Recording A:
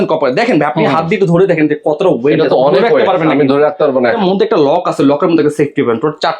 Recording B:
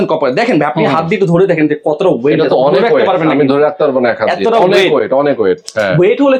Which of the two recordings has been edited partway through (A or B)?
A